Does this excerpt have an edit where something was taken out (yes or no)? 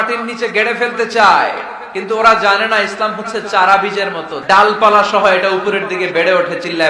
yes